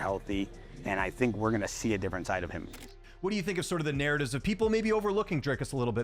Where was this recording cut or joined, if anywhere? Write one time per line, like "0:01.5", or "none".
0:02.7